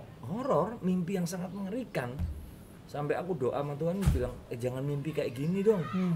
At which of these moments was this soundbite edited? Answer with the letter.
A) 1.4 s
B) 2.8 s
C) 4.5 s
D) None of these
C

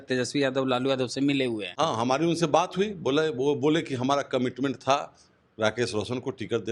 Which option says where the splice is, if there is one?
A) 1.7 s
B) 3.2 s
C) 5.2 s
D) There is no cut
A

